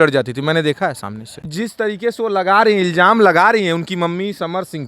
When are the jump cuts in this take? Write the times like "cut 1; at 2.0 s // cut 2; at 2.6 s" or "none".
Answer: cut 1; at 1.4 s